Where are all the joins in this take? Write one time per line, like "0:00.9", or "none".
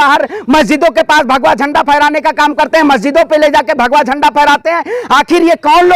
none